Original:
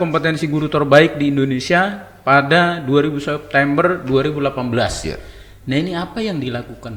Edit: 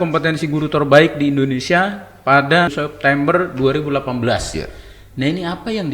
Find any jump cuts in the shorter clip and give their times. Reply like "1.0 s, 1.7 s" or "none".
2.7 s